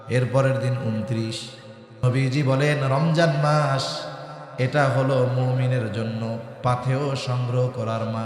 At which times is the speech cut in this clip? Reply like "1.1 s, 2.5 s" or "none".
2.0 s